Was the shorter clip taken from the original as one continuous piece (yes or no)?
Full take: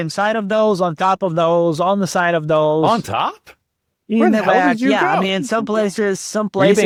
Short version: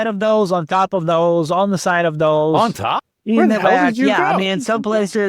no